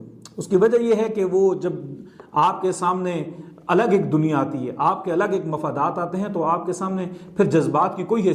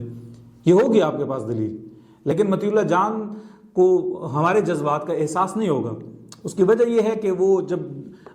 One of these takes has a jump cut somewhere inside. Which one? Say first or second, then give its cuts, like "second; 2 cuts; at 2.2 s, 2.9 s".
second; 1 cut; at 2.3 s